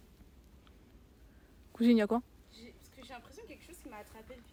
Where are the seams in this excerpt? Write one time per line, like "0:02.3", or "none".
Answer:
none